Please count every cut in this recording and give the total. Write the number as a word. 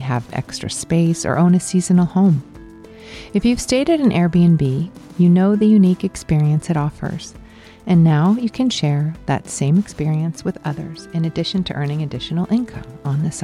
zero